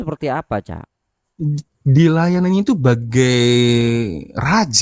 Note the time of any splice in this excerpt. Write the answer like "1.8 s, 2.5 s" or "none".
none